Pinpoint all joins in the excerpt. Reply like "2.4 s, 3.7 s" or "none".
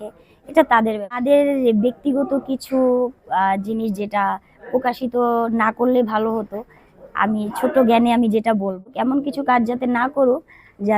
1.2 s, 8.9 s